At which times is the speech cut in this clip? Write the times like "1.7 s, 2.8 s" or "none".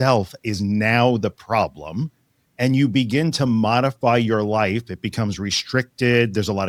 none